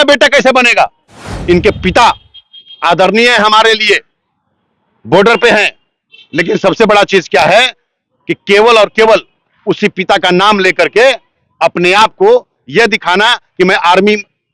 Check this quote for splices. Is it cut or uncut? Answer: cut